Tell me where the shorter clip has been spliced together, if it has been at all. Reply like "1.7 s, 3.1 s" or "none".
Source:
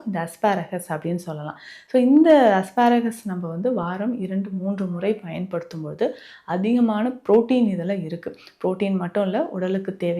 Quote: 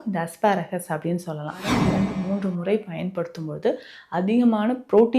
1.6 s